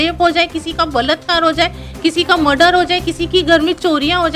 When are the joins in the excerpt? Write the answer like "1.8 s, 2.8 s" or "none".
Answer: none

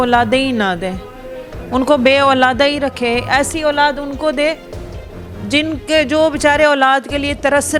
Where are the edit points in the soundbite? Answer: none

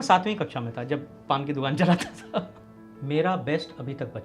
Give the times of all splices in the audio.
2.6 s

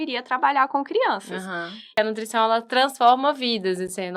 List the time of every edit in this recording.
1.8 s

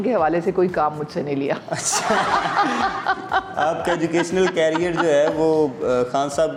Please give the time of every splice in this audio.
none

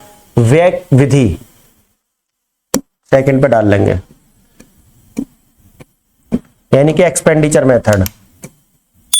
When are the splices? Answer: none

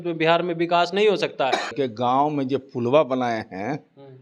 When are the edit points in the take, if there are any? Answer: 1.7 s

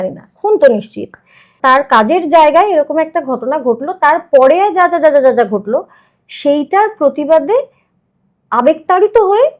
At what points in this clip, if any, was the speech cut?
1.5 s

